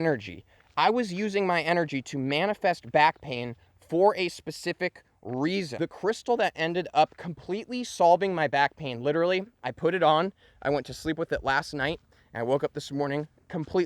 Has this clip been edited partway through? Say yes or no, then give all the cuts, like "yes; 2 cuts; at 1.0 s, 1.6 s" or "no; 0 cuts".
yes; 1 cut; at 5.7 s